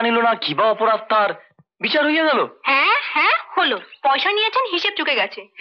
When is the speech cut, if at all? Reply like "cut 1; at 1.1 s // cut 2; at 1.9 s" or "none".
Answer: none